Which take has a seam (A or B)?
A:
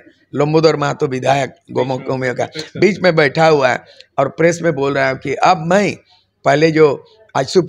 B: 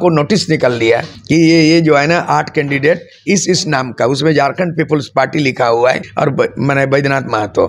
B